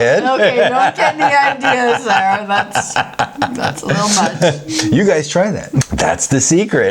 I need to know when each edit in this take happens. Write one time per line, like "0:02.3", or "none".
0:05.7